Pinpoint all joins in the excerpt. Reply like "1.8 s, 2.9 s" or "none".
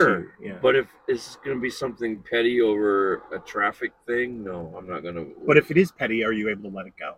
none